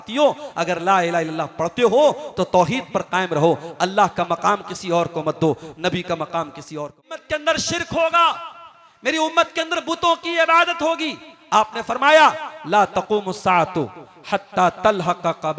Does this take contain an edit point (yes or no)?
yes